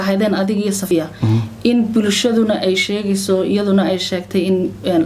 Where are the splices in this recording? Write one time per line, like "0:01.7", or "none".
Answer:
0:00.9